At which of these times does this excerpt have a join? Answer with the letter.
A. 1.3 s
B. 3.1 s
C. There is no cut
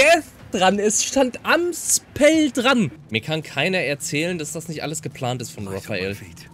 B